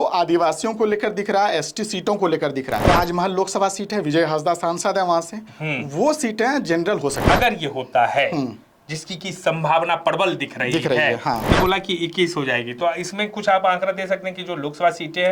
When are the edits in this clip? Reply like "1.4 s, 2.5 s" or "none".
2.9 s, 7.2 s, 11.5 s